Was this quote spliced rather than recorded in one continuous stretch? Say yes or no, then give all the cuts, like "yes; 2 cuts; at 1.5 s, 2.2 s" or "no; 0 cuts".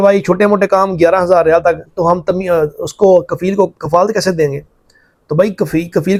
no; 0 cuts